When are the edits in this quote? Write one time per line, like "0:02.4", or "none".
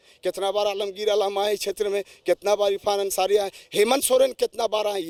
none